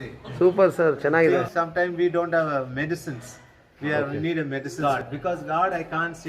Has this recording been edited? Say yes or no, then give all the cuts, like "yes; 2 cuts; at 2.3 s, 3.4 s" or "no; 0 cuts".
yes; 2 cuts; at 1.4 s, 4.8 s